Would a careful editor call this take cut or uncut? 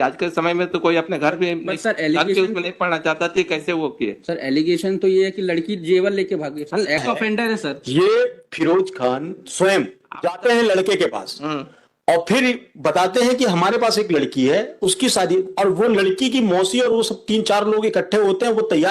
cut